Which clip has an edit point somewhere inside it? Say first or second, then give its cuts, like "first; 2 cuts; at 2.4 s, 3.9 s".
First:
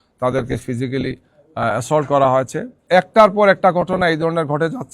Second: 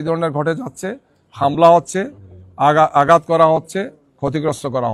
first; 1 cut; at 2.7 s